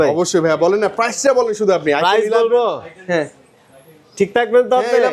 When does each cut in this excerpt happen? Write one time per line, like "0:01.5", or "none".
none